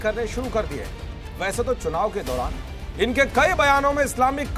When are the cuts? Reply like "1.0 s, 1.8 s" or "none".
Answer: none